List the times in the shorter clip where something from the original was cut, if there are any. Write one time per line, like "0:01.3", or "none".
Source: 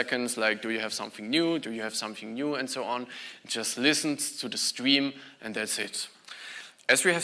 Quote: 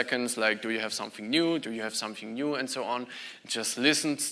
none